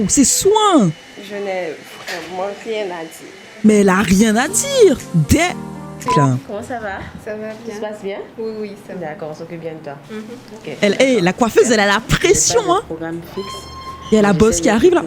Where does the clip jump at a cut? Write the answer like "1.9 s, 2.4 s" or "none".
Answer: 6.1 s